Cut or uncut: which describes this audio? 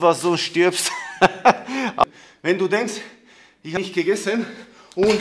cut